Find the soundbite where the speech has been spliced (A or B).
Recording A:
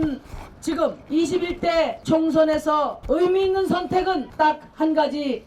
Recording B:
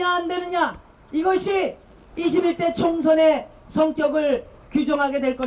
A